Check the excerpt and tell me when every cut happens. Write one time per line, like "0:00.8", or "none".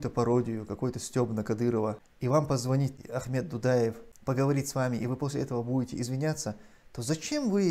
0:02.1
0:03.0
0:04.1